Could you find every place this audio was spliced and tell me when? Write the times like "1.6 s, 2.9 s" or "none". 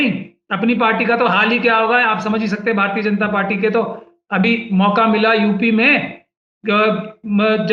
none

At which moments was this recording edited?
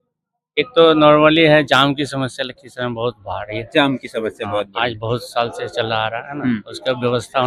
none

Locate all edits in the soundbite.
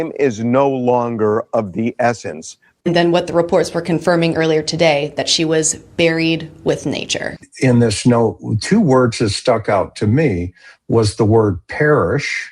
2.8 s, 7.4 s

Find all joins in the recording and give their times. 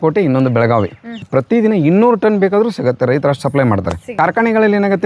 1.2 s, 4.1 s

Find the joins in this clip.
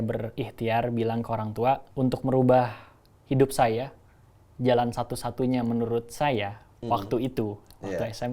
1.9 s

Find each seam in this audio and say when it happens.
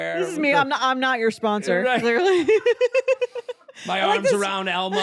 none

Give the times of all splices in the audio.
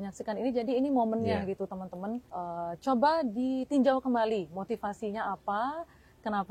2.3 s

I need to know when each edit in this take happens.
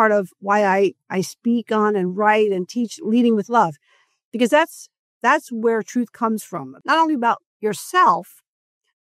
6.7 s

